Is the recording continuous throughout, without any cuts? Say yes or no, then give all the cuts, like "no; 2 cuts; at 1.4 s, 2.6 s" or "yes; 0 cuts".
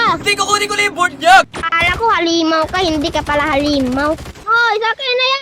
no; 2 cuts; at 1.5 s, 4.4 s